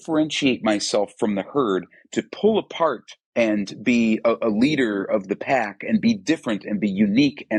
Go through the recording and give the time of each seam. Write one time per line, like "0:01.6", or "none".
none